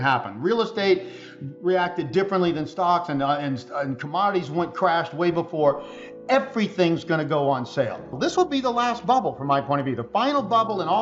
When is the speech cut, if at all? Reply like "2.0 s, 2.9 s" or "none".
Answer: 8.3 s